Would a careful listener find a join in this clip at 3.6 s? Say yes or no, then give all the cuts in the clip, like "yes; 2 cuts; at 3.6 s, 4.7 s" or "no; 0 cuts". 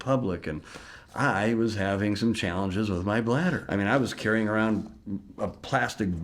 yes; 1 cut; at 3.6 s